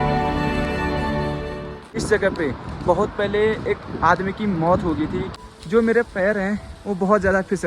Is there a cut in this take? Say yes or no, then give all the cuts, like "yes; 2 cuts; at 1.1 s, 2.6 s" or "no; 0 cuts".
yes; 2 cuts; at 1.9 s, 5.4 s